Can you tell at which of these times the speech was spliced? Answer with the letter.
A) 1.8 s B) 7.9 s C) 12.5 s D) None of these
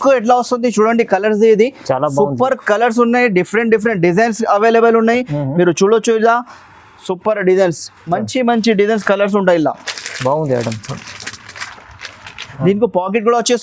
C